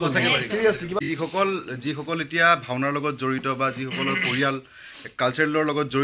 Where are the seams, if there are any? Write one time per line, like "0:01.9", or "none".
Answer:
0:01.0